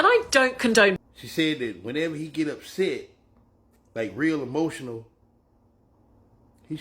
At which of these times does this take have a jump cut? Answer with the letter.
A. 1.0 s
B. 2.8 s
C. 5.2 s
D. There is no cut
A